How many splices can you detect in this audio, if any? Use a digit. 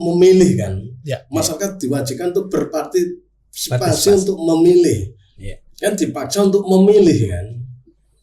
0